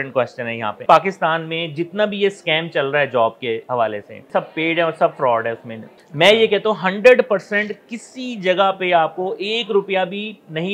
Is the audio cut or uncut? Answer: cut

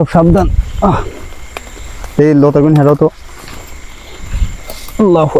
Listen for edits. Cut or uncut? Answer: uncut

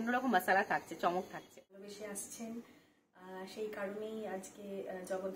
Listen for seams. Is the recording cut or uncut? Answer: cut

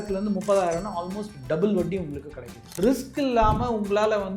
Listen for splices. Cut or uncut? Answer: cut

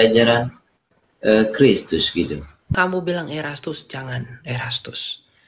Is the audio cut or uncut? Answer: cut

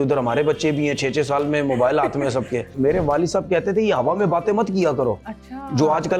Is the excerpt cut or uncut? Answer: cut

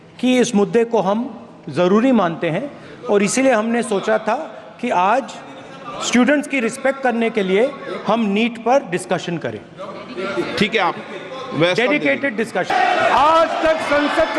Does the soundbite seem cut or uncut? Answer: uncut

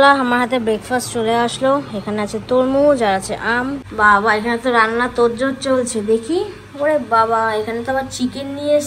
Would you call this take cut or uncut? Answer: cut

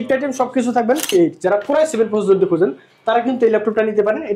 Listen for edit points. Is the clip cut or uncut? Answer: cut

